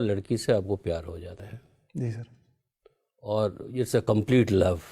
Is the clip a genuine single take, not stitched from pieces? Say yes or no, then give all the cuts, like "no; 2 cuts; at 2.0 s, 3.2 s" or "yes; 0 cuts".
no; 1 cut; at 1.4 s